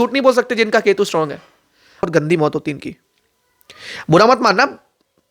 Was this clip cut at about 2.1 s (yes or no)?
yes